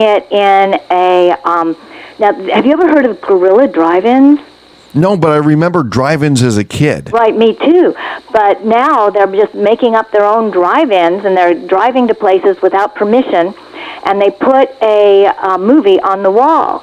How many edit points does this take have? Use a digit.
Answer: 0